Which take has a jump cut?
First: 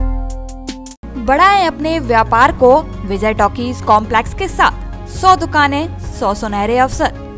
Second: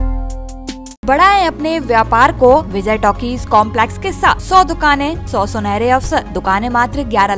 second; 5 cuts; at 1.0 s, 2.7 s, 4.4 s, 5.2 s, 6.3 s

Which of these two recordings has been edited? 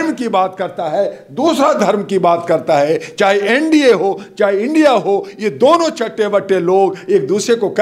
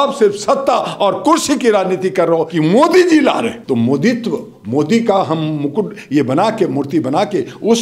second; 2 cuts; at 2.5 s, 3.6 s

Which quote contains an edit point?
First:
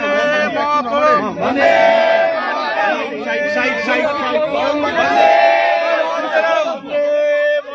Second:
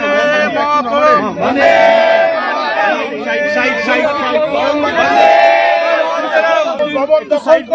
second; 1 cut; at 6.8 s

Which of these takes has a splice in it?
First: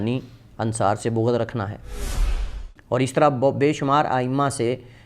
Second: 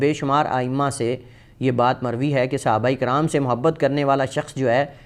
first; 1 cut; at 2.2 s

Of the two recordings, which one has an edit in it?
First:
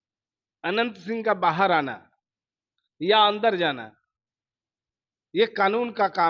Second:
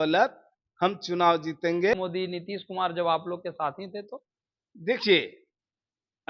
second; 1 cut; at 1.9 s

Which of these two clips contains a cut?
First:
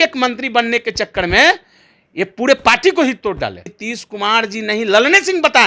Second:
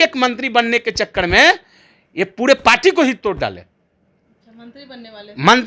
first; 1 cut; at 3.8 s

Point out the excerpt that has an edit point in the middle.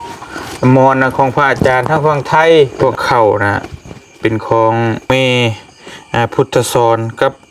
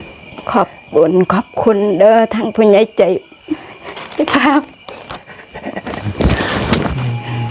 first; 2 cuts; at 2.7 s, 5.1 s

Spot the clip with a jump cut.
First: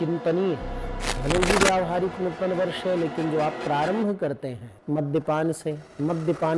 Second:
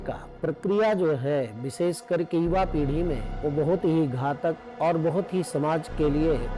first; 1 cut; at 1.0 s

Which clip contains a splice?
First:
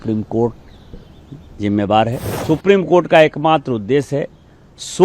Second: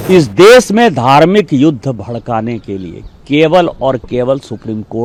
first; 1 cut; at 2.3 s

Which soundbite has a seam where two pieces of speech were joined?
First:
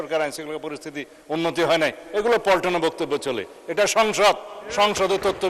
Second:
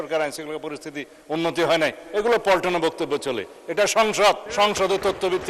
second; 1 cut; at 4.4 s

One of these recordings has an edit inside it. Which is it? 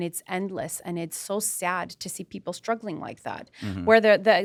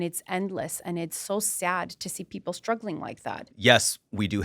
second; 1 cut; at 3.5 s

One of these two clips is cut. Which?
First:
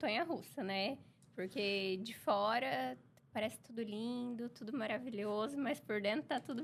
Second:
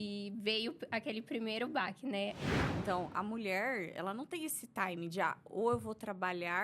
second; 1 cut; at 2.4 s

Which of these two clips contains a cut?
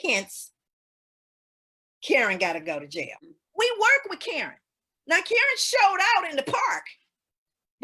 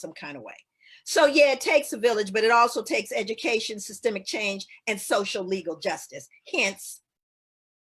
first; 1 cut; at 3.3 s

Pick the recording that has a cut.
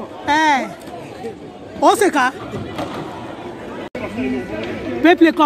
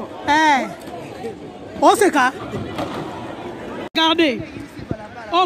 second; 1 cut; at 3.9 s

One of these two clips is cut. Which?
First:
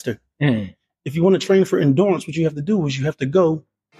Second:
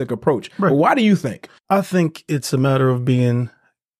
second; 1 cut; at 1.5 s

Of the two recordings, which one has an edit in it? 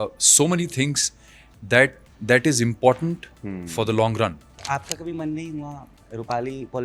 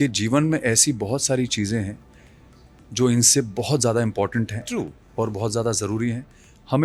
first; 1 cut; at 4.6 s

